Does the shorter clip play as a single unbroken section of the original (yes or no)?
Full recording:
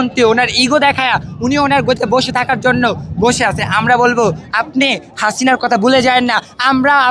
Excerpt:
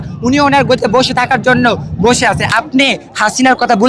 no